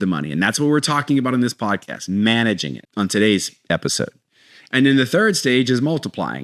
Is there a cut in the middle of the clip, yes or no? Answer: yes